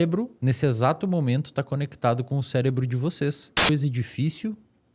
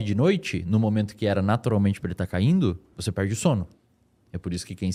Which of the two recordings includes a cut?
first; 1 cut; at 3.7 s

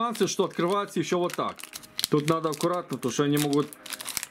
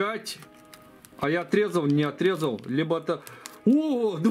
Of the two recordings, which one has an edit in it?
first; 1 cut; at 1.7 s

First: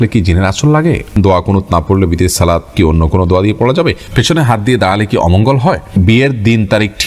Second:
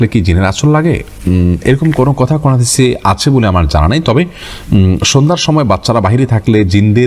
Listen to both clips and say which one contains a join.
first; 4 cuts; at 1.1 s, 2.7 s, 4.0 s, 6.0 s

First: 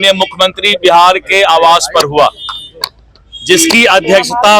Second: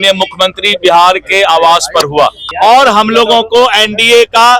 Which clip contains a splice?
second; 1 cut; at 2.4 s

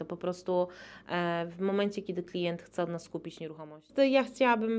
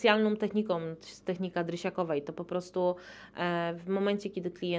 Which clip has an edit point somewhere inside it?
first; 1 cut; at 3.9 s

